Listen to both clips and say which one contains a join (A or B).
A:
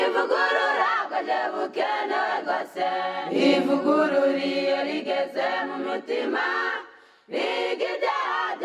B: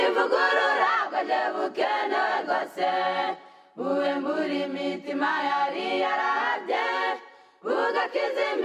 A